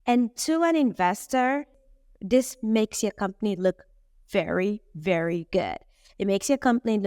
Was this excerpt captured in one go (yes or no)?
no